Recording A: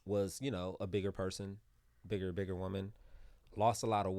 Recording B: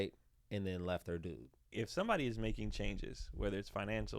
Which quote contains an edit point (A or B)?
B